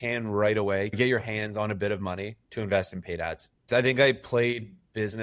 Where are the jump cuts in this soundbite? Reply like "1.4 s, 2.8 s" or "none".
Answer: 1.0 s, 3.5 s